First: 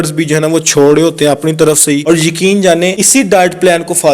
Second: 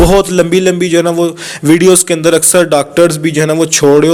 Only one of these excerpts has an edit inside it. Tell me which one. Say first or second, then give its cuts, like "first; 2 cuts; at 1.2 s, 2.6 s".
first; 2 cuts; at 2.0 s, 3.0 s